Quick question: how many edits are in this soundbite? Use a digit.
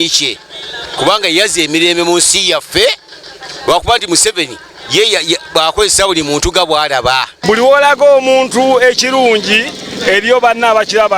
1